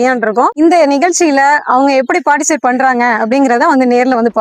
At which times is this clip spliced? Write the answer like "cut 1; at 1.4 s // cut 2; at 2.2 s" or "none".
none